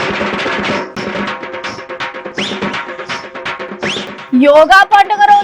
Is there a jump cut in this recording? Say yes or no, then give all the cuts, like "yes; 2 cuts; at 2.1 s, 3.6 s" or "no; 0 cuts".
no; 0 cuts